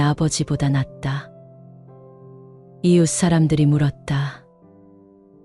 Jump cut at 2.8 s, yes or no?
yes